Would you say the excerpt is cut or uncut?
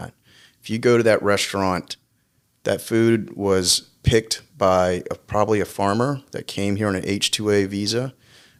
uncut